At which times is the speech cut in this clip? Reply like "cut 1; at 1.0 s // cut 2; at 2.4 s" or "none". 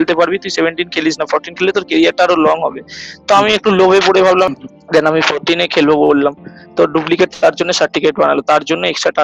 cut 1; at 4.5 s